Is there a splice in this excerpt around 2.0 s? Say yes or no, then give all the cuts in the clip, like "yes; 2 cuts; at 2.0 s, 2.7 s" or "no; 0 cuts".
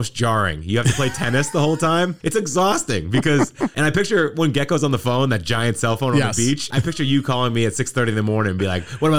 no; 2 cuts; at 3.7 s, 6.7 s